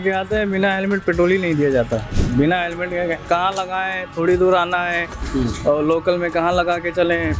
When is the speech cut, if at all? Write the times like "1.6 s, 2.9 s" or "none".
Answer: 2.2 s